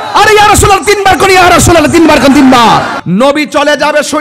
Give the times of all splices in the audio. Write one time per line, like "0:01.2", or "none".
0:03.0

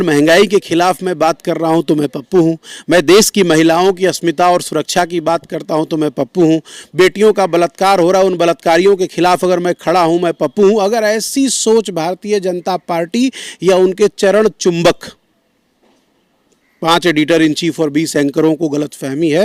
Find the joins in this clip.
none

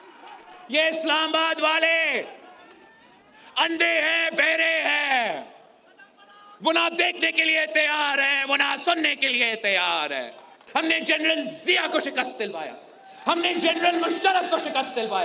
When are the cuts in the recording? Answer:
0:10.5

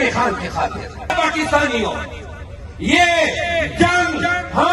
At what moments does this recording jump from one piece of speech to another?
0:01.1

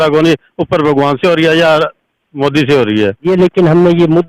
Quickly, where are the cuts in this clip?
0:03.2

